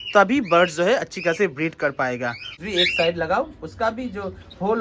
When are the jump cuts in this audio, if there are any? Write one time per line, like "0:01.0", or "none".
0:02.6